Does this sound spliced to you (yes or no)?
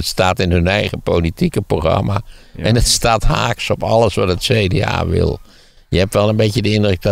no